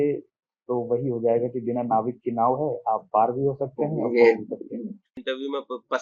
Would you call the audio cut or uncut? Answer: cut